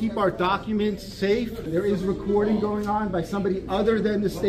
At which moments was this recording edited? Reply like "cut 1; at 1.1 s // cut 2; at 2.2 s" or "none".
cut 1; at 1.7 s